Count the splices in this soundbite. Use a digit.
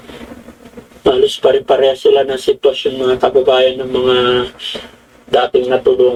0